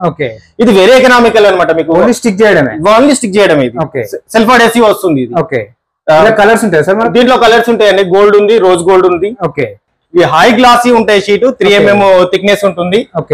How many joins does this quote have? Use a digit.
1